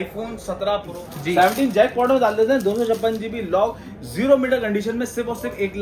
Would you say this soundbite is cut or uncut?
cut